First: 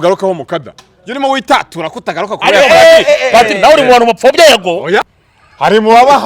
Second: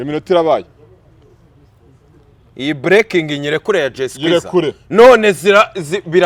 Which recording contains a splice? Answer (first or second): first